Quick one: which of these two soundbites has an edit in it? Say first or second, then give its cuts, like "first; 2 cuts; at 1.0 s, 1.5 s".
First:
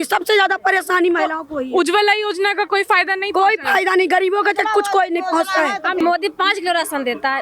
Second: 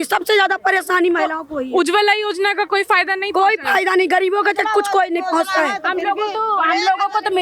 first; 1 cut; at 6.0 s